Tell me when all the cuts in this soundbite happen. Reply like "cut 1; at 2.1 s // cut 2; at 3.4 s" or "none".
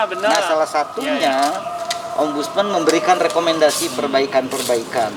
none